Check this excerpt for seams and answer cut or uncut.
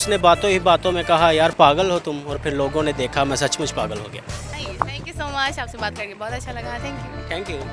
uncut